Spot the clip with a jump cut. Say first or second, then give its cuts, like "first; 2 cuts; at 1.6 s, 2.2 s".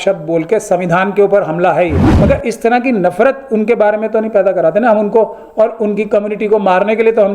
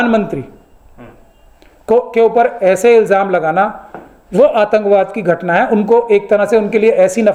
first; 1 cut; at 2.1 s